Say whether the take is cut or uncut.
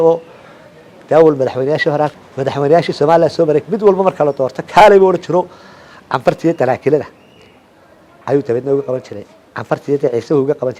cut